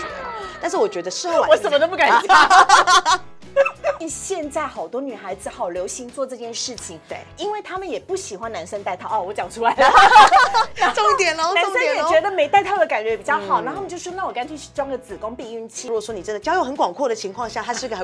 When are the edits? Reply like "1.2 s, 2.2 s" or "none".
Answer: 4.1 s, 15.9 s